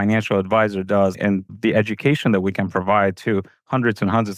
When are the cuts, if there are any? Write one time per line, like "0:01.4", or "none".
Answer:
none